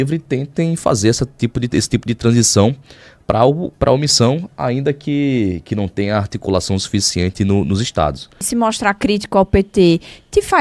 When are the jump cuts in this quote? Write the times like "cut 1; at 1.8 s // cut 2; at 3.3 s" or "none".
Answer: cut 1; at 8.4 s

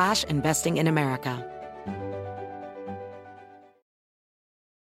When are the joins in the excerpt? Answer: cut 1; at 1.4 s

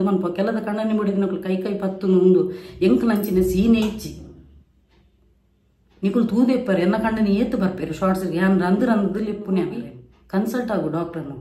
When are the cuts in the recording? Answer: cut 1; at 9.7 s

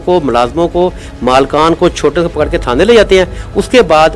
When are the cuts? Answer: none

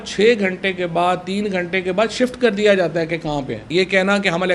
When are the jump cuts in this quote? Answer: cut 1; at 3.6 s

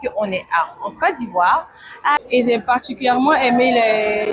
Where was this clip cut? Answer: cut 1; at 2.2 s

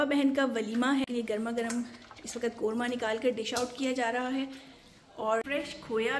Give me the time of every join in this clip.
cut 1; at 1.0 s // cut 2; at 5.4 s

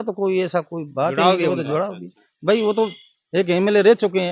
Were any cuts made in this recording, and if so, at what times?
none

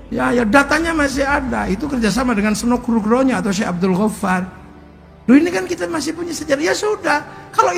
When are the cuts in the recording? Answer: none

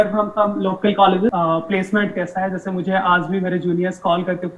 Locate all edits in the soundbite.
cut 1; at 1.3 s

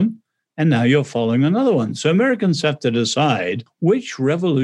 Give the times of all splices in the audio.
cut 1; at 3.7 s

